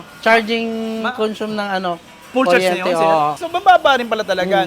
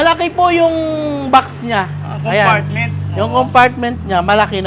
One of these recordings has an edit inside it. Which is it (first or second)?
first